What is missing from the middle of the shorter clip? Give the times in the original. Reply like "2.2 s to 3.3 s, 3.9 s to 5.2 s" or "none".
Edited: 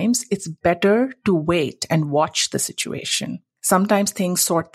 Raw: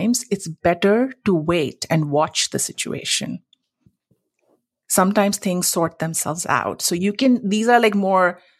3.5 s to 4.8 s